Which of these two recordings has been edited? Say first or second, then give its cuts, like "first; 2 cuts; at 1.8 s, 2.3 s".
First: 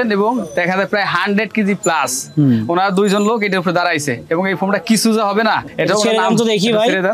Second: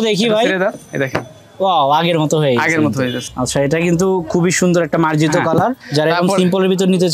second; 1 cut; at 3.2 s